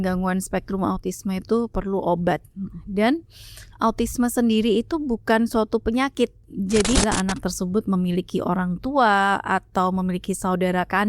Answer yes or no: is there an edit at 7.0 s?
yes